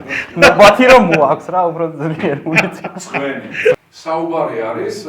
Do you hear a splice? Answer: yes; 1 cut; at 3.8 s

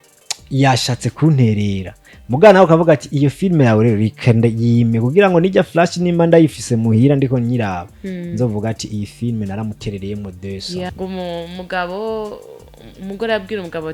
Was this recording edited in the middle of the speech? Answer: yes; 1 cut; at 10.9 s

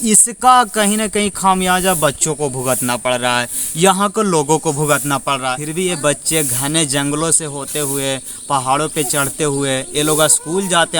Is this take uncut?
no; 1 cut; at 5.6 s

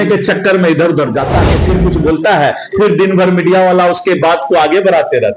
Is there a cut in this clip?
yes; 1 cut; at 1.6 s

